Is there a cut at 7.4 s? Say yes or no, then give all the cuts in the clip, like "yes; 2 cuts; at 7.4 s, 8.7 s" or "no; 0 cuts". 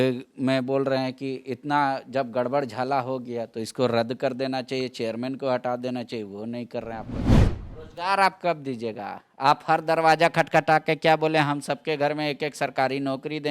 yes; 1 cut; at 7.4 s